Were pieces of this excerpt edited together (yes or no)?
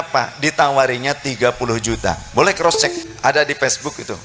yes